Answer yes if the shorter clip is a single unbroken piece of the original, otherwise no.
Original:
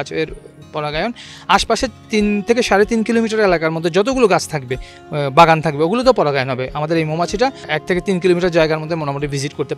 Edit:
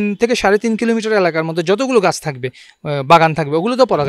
yes